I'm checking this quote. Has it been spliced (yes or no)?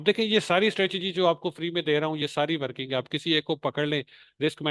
no